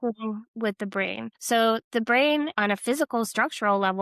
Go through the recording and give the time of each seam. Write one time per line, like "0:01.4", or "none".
0:01.4
0:02.5